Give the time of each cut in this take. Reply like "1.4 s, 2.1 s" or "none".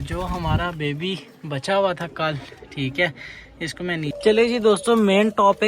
4.1 s